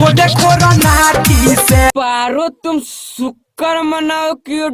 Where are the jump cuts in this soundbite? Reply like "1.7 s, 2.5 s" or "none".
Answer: 1.9 s